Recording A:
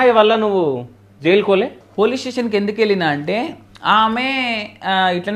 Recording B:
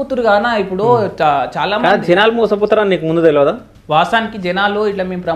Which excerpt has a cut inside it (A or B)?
A